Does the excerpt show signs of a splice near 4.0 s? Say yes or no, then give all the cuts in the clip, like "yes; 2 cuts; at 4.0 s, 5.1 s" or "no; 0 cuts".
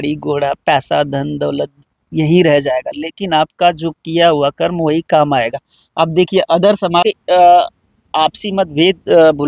no; 1 cut; at 7.0 s